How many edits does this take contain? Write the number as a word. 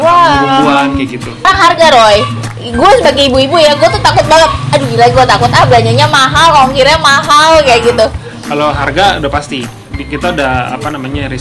one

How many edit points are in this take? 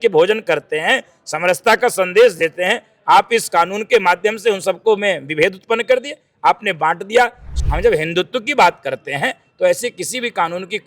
one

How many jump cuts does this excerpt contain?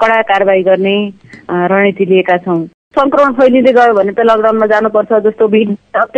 one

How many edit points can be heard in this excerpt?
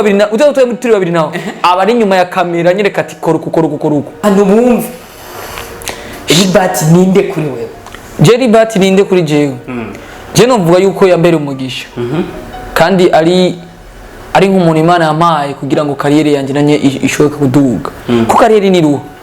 one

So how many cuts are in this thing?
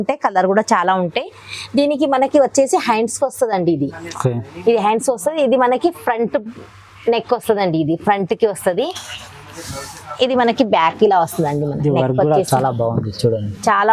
zero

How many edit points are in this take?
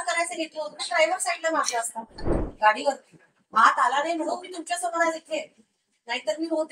one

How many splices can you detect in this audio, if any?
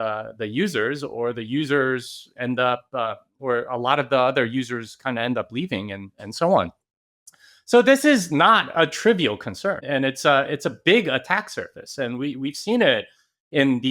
one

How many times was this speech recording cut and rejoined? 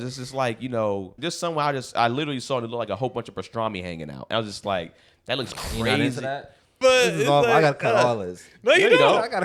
two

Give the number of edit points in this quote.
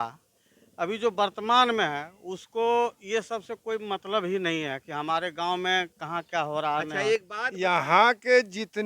one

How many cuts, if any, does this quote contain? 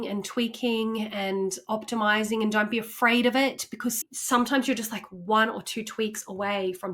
one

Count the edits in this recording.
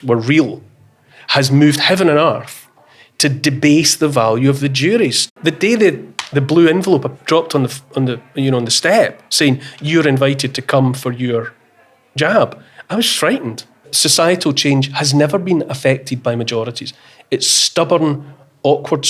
two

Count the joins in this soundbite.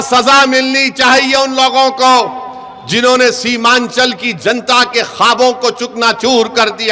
zero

